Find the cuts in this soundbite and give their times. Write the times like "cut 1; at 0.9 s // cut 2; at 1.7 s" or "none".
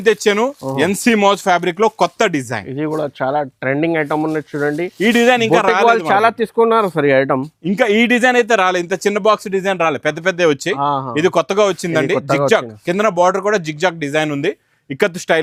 none